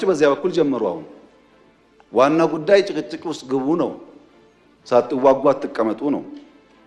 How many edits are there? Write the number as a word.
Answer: zero